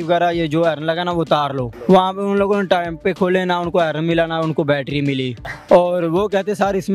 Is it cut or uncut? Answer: cut